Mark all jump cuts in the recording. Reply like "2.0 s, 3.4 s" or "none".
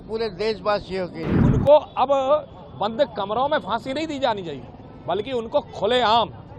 1.4 s